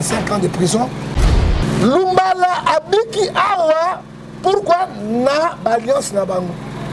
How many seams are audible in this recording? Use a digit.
1